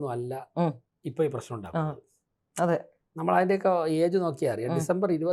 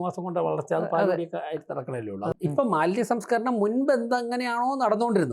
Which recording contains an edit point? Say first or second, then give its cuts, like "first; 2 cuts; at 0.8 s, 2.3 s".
second; 1 cut; at 2.3 s